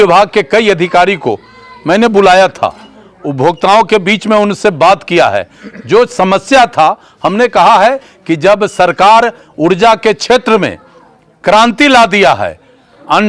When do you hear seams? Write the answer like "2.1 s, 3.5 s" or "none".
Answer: none